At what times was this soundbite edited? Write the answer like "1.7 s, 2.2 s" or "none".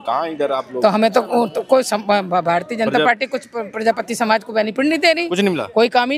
none

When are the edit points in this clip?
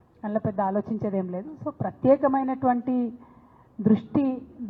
none

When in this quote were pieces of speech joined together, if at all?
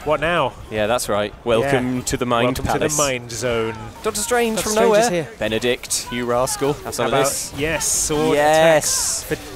1.0 s, 4.0 s, 5.3 s, 6.9 s

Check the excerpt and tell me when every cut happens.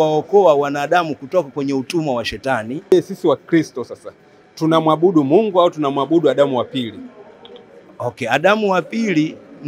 2.9 s

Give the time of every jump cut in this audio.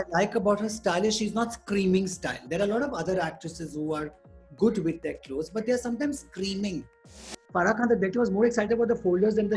7.3 s

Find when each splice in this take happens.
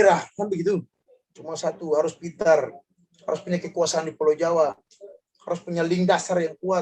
1.0 s

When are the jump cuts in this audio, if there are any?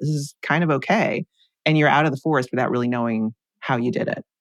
3.5 s

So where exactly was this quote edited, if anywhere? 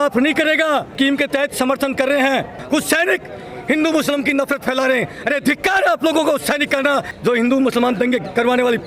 0.9 s, 2.6 s, 7.1 s

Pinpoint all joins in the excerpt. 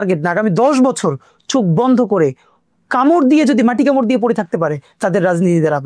none

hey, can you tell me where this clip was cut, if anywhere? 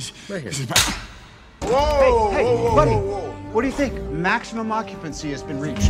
1.6 s

